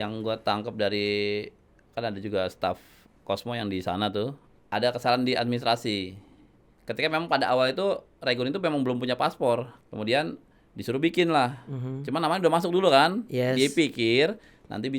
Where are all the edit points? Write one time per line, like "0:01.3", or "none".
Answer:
0:04.5
0:09.8